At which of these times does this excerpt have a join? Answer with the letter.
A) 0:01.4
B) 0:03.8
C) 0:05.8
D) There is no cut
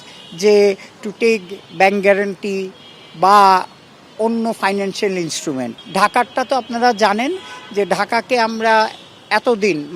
C